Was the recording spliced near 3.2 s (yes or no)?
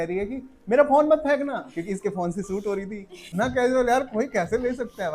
yes